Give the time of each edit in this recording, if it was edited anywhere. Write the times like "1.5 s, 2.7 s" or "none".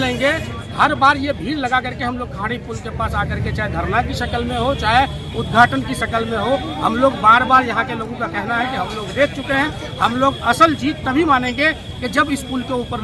none